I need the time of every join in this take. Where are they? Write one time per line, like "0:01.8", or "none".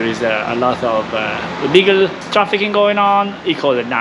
0:02.2